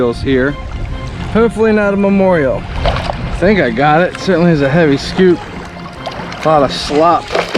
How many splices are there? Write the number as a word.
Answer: one